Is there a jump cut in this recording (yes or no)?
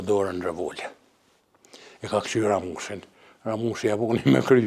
no